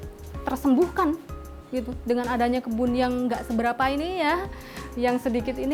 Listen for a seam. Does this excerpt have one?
no; 0 cuts

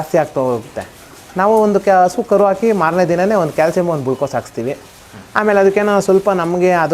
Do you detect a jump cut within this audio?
no; 0 cuts

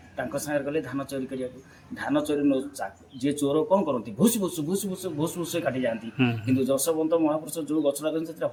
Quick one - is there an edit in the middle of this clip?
no; 0 cuts

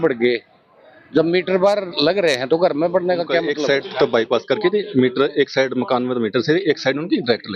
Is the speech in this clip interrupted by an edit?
yes; 1 cut; at 3.5 s

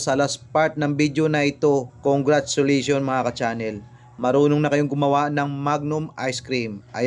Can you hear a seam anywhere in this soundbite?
no; 0 cuts

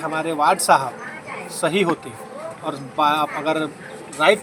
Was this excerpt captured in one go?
yes; 0 cuts

